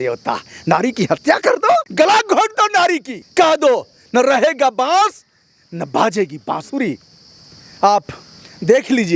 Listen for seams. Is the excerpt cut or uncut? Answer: cut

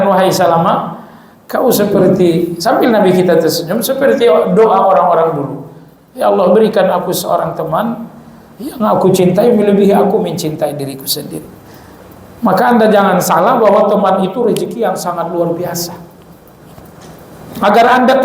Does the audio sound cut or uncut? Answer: uncut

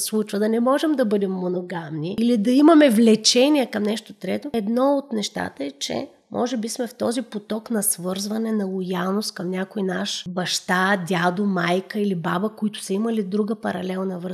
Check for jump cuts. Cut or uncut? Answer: cut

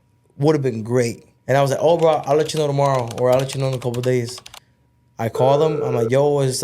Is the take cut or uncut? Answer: cut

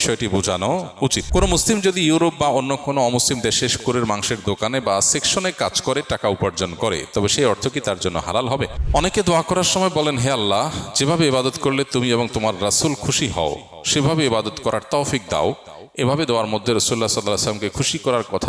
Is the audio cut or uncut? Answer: cut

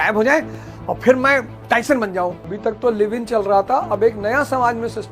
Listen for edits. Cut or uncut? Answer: cut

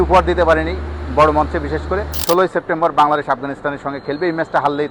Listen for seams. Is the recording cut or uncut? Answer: cut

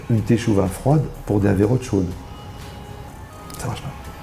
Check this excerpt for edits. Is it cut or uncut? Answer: cut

